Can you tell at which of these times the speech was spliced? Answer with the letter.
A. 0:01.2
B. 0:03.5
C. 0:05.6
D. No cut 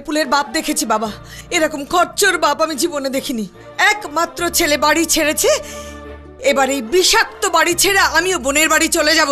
D